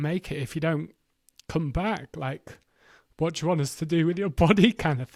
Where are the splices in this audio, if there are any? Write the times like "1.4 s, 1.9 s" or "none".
none